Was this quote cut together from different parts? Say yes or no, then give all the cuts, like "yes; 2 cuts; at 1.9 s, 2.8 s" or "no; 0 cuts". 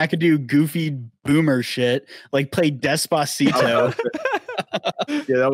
no; 0 cuts